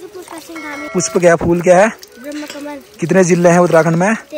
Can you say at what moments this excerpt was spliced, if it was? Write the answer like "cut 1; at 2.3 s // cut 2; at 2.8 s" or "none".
cut 1; at 1.0 s

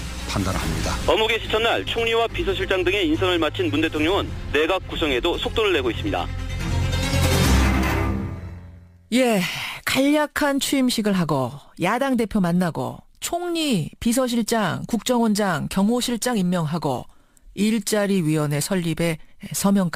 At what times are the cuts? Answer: none

